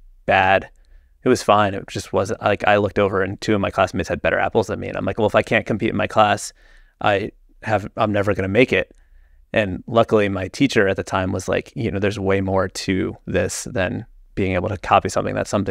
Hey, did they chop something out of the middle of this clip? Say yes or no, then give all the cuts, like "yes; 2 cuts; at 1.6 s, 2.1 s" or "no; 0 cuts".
no; 0 cuts